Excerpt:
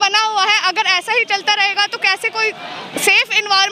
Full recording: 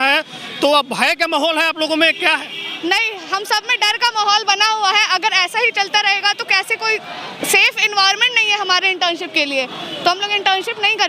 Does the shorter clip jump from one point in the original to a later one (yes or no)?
no